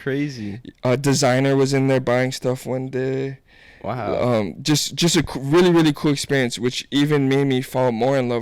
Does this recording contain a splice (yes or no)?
no